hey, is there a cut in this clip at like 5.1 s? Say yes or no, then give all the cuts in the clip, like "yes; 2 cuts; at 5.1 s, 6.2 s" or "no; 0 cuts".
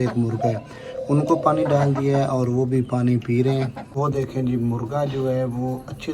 no; 1 cut; at 3.8 s